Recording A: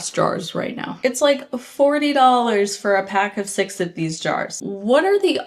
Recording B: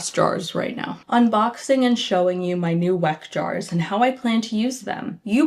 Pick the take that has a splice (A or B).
A